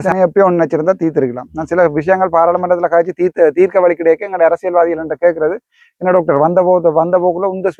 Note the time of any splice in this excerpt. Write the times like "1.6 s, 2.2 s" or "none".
none